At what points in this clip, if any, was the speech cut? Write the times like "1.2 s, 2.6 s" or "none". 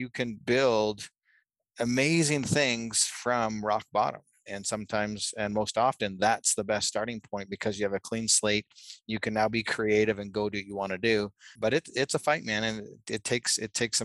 11.5 s